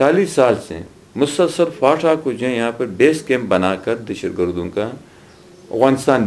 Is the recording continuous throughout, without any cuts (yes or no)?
yes